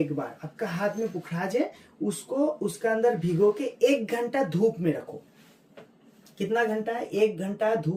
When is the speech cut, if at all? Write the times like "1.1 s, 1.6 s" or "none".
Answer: none